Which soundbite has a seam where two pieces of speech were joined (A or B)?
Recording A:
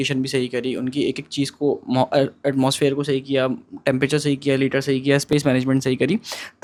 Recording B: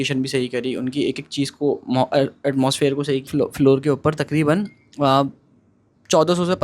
B